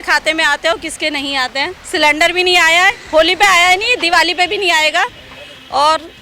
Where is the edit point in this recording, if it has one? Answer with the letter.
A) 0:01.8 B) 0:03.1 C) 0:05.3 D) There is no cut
D